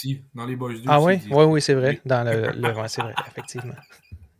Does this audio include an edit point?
no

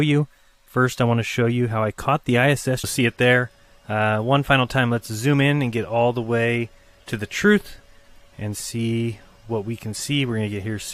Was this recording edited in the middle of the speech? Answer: no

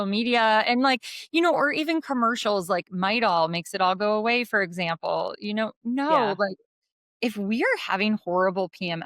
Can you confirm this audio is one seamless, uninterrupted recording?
yes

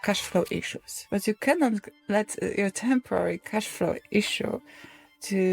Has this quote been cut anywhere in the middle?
yes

